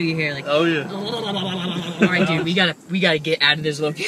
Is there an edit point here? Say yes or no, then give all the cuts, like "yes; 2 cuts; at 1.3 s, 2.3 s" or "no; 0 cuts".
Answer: yes; 1 cut; at 2.3 s